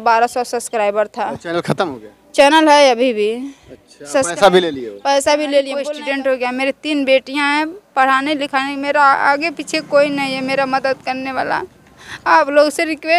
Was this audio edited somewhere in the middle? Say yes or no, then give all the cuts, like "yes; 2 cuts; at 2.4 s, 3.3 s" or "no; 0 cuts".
yes; 1 cut; at 5.9 s